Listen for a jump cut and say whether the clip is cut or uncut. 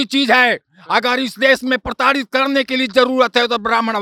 uncut